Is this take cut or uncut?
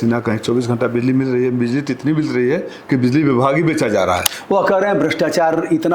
cut